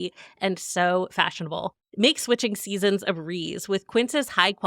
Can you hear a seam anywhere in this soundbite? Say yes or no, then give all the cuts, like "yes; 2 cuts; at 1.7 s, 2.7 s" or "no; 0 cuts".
yes; 1 cut; at 1.8 s